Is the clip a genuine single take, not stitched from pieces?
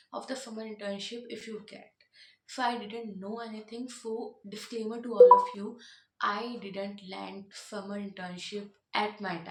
yes; 0 cuts

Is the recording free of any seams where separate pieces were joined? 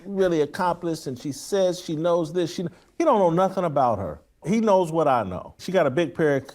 no; 2 cuts; at 4.4 s, 5.6 s

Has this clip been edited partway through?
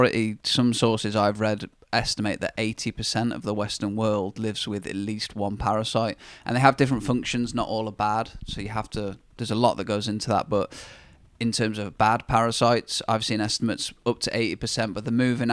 no; 0 cuts

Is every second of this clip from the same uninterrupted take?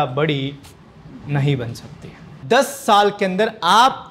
no; 1 cut; at 2.4 s

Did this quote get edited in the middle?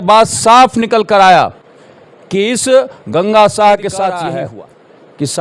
yes; 1 cut; at 4.3 s

